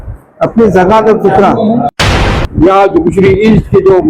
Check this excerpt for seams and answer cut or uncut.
cut